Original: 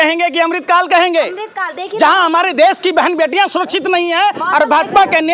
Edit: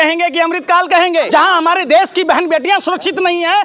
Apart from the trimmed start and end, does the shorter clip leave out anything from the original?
yes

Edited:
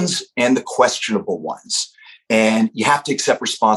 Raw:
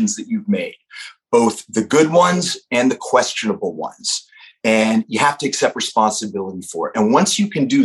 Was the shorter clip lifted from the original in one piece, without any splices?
yes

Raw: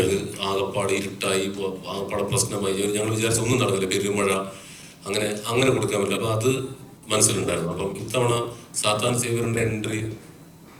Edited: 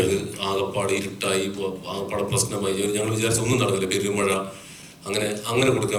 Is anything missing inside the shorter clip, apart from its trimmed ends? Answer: no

